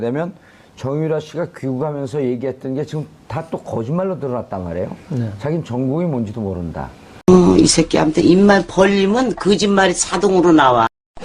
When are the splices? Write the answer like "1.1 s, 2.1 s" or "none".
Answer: 7.0 s